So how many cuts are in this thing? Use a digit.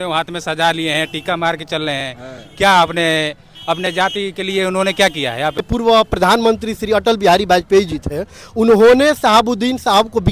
1